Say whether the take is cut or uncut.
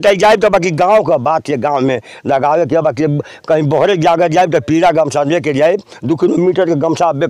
uncut